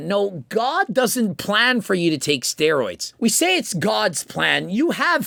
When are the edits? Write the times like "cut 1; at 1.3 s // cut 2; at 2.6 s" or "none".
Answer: none